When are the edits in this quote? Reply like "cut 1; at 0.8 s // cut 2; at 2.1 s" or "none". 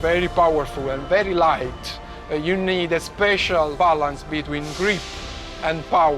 cut 1; at 3.7 s